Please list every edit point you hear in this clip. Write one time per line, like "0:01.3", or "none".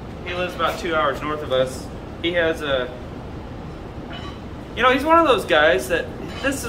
none